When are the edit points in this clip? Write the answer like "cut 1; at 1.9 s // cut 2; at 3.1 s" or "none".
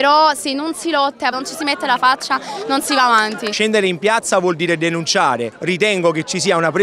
cut 1; at 1.3 s // cut 2; at 3.5 s // cut 3; at 5.5 s